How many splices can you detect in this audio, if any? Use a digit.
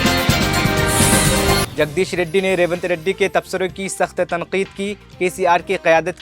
1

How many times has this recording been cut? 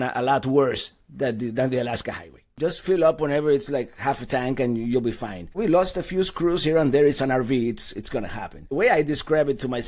3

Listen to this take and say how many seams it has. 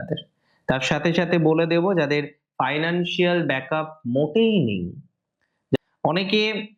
1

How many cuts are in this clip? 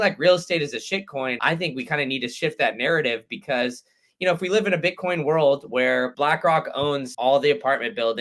2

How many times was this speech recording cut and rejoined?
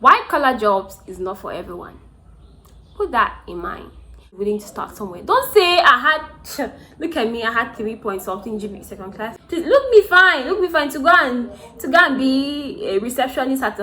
2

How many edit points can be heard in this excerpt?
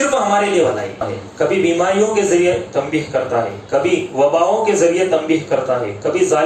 1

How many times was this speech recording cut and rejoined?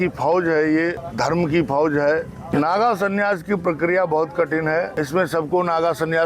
3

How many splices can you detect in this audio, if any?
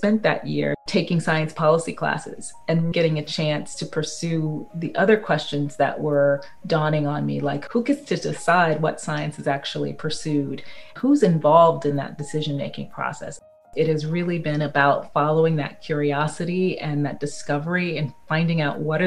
5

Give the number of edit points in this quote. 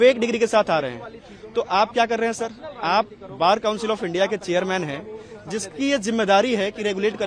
0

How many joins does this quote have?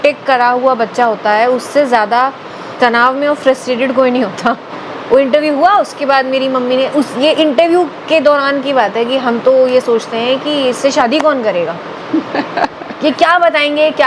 2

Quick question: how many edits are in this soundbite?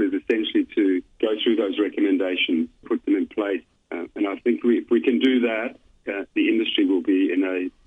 1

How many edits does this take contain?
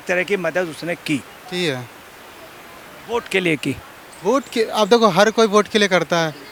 0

